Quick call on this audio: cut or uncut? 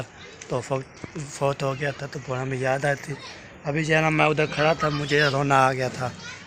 uncut